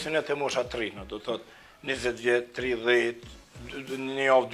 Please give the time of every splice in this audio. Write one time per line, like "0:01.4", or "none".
none